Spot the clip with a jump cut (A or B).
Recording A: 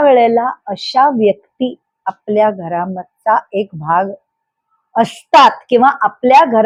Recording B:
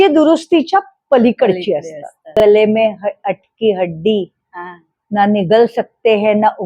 B